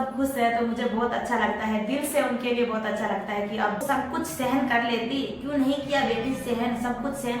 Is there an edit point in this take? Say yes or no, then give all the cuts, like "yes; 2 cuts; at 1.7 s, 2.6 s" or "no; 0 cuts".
yes; 1 cut; at 3.8 s